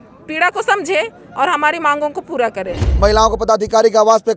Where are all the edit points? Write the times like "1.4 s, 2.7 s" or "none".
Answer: 2.9 s